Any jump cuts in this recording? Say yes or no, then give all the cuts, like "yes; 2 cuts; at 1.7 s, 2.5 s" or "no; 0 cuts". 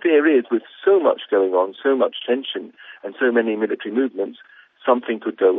no; 0 cuts